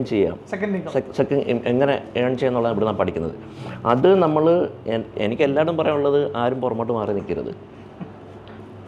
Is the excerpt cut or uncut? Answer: uncut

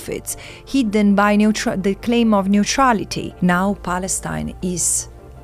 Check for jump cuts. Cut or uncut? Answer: cut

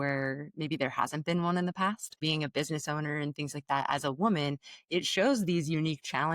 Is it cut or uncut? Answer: cut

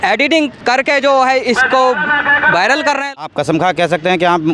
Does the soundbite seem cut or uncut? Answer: cut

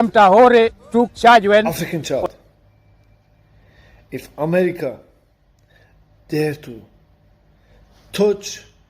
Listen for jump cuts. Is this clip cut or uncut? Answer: cut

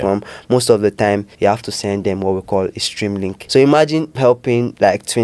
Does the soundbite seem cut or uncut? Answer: cut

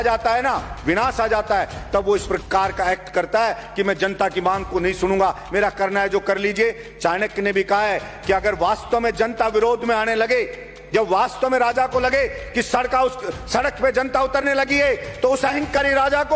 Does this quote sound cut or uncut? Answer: uncut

